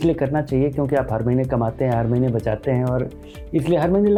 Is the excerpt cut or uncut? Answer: uncut